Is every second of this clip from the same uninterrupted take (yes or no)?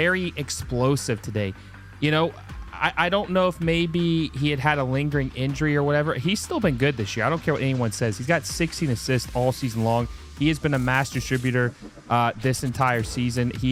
yes